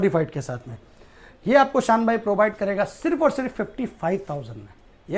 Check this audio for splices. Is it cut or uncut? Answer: uncut